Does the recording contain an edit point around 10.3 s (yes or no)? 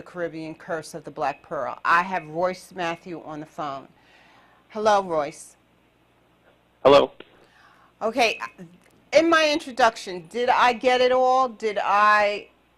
no